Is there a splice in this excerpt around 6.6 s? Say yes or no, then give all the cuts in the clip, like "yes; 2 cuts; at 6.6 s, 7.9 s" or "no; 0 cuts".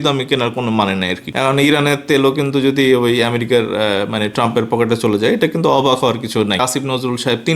yes; 2 cuts; at 1.2 s, 6.6 s